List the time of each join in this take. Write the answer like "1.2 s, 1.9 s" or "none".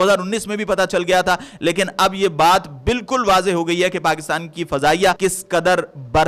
5.2 s